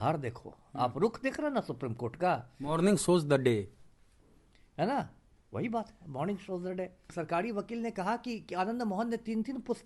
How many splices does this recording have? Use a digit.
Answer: 1